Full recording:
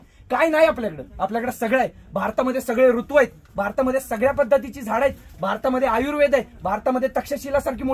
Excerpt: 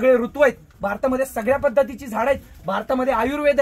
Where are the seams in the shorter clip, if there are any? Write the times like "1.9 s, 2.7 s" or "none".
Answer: none